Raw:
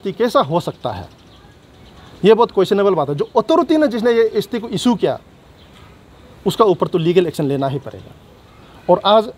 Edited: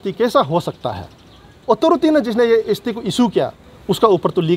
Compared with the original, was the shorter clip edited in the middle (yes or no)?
yes